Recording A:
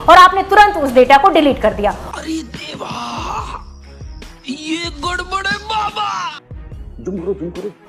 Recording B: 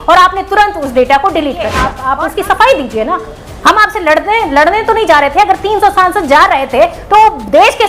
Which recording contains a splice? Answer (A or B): B